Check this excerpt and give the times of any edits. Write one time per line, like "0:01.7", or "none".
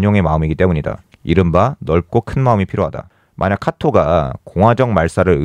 0:03.1